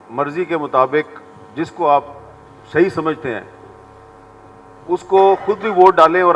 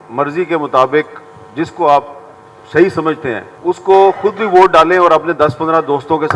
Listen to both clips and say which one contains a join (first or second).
second